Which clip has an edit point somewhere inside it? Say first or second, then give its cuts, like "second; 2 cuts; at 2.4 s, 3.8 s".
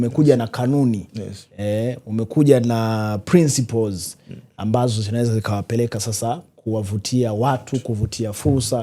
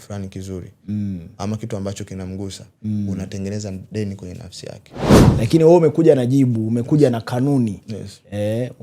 second; 1 cut; at 5.2 s